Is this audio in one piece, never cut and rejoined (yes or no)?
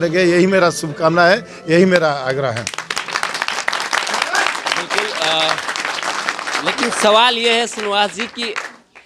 yes